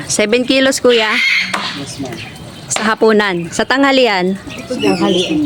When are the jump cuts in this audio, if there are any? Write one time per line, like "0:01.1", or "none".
none